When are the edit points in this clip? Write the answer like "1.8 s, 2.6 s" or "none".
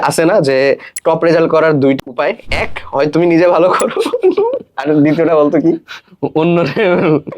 2.0 s